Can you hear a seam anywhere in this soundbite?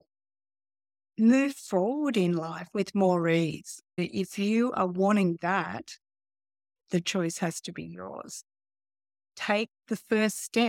yes; 1 cut; at 4.0 s

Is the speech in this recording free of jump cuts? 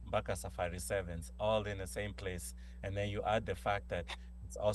yes; 0 cuts

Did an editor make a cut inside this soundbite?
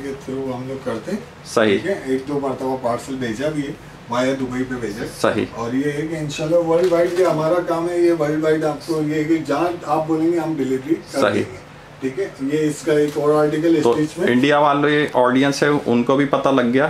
no; 0 cuts

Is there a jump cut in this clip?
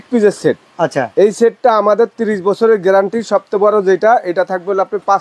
no; 0 cuts

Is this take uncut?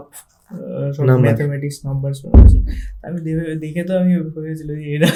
yes; 0 cuts

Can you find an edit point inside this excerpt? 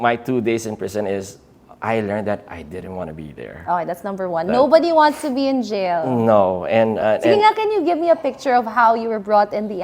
no; 0 cuts

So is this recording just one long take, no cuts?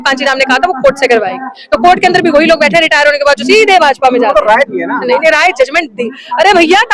yes; 0 cuts

